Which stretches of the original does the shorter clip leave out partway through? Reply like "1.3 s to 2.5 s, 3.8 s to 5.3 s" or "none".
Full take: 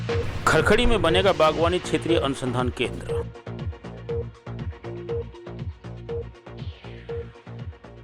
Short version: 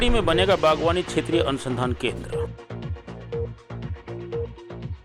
none